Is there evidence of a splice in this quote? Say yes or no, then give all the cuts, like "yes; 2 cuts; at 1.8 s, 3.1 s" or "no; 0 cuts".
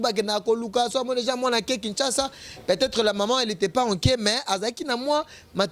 no; 0 cuts